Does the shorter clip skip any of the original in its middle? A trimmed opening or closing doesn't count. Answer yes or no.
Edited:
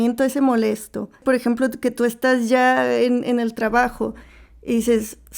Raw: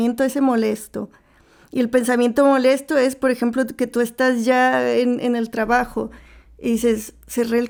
yes